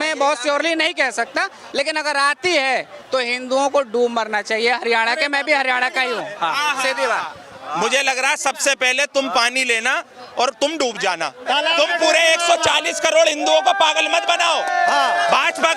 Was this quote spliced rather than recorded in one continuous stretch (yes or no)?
yes